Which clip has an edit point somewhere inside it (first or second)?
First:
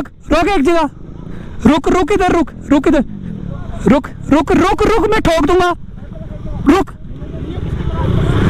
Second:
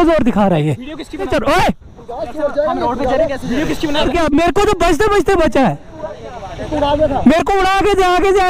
second